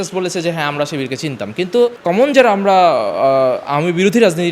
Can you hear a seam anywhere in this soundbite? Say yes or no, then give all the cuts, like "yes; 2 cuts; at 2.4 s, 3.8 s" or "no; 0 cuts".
yes; 1 cut; at 2.0 s